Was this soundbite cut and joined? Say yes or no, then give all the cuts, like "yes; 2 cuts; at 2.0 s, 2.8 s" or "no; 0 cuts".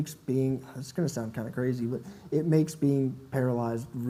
no; 0 cuts